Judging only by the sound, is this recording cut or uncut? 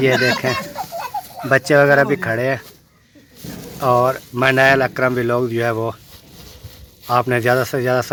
uncut